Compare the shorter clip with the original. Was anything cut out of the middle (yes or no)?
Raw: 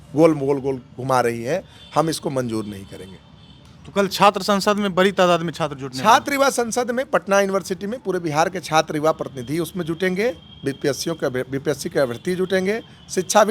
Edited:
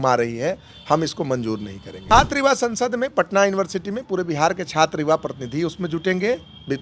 yes